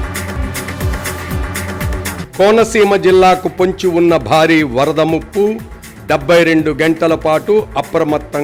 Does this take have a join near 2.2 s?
yes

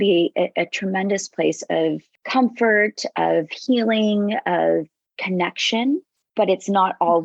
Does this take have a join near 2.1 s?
yes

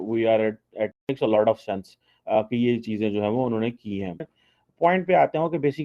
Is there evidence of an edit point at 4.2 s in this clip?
yes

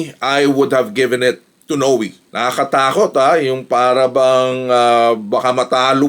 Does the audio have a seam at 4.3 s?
no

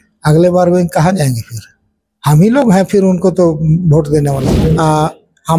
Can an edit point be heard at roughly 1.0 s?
no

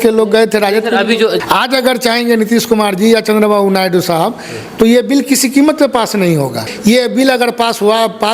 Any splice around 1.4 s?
yes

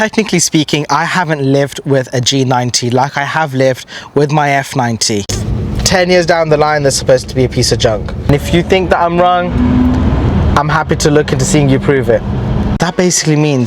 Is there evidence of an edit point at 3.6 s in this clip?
no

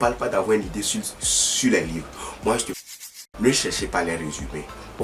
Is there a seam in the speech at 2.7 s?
yes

